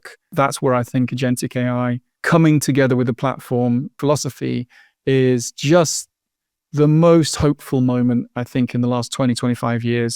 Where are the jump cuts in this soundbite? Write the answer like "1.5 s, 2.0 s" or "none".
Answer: 2.1 s